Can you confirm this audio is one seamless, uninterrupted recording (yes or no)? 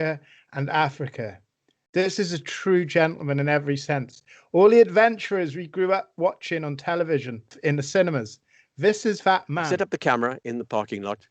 no